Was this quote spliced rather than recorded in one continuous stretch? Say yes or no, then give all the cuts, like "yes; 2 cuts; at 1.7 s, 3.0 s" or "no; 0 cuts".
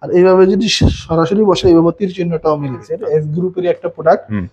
yes; 1 cut; at 2.9 s